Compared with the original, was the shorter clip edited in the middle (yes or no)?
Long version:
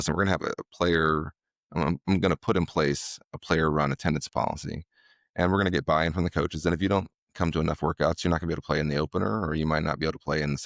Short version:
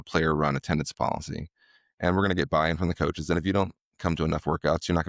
no